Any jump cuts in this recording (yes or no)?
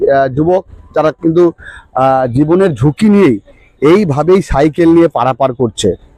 no